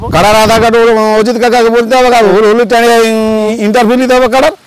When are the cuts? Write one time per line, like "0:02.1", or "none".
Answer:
0:02.3
0:03.5

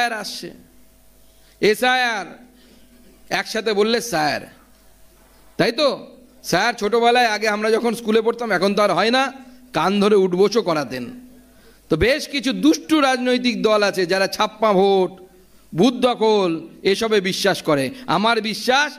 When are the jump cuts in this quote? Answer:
none

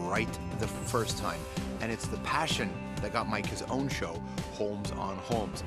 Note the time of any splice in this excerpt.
0:02.7

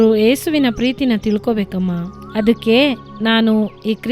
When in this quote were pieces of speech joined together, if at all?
none

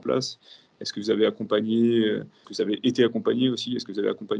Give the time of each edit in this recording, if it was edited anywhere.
0:02.4

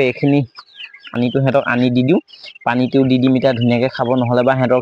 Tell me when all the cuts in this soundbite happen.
0:01.1

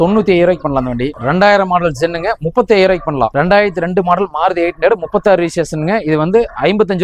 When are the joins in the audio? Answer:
none

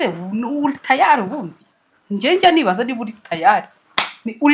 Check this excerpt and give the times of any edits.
none

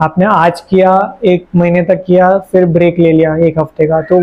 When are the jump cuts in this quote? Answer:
none

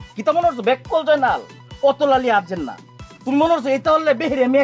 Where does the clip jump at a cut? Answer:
none

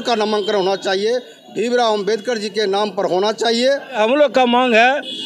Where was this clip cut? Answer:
0:04.0

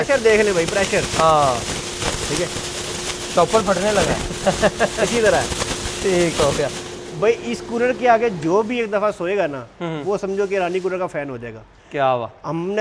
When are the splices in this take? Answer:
none

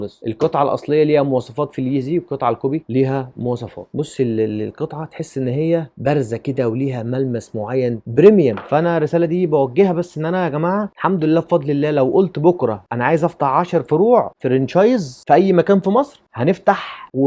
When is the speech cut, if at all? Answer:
0:03.9
0:08.6

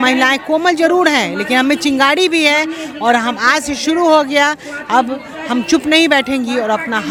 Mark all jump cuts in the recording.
none

